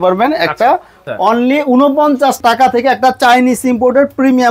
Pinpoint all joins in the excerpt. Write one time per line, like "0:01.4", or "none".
0:01.0